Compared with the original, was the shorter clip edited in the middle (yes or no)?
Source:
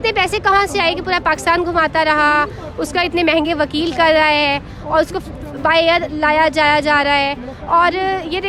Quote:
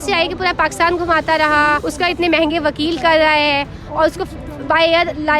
yes